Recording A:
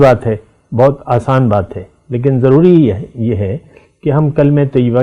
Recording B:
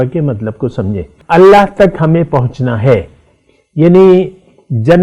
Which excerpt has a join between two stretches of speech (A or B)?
B